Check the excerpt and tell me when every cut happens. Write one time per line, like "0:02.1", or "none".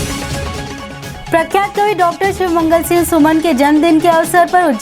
0:01.2

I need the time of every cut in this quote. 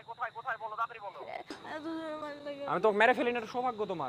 0:01.6

